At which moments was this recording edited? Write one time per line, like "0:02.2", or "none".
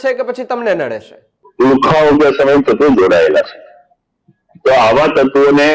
0:01.4